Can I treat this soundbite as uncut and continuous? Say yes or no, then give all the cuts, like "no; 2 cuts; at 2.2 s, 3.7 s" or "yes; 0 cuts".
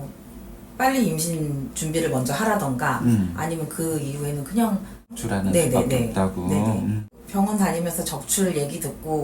no; 2 cuts; at 5.2 s, 7.1 s